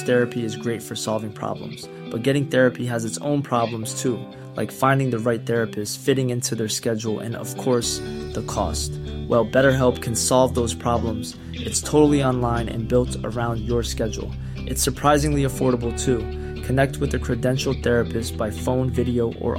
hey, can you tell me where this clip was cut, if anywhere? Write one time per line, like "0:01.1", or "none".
none

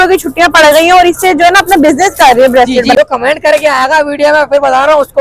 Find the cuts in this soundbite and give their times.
0:02.9

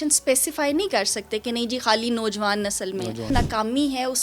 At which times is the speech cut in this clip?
0:03.3

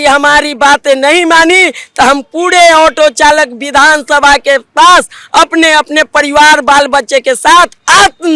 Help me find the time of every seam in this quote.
none

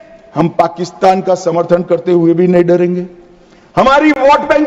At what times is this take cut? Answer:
none

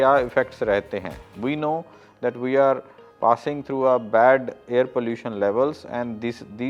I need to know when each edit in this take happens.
none

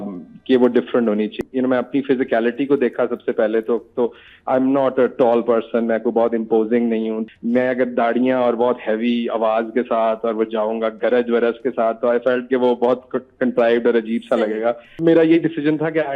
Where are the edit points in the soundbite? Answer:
0:01.4
0:07.2
0:14.9

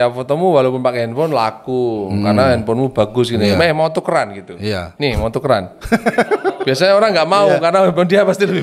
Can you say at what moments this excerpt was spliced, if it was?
none

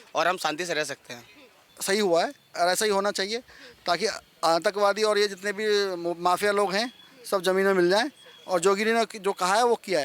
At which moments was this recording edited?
0:01.7

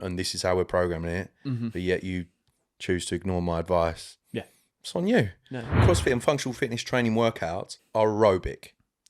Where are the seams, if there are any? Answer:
0:05.8
0:07.7

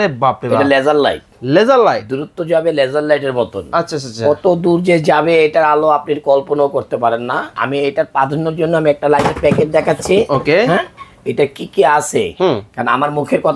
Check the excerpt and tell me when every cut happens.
0:07.6

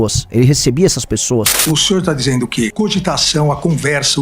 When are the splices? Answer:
0:01.5

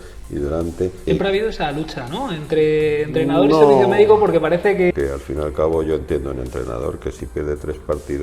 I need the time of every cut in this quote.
0:01.1
0:04.9

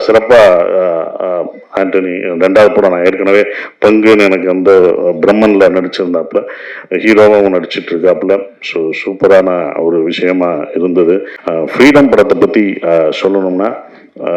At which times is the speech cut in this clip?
0:11.3

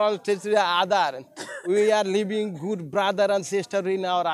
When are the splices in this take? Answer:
none

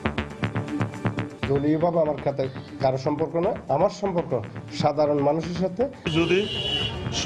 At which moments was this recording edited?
0:01.3
0:06.1

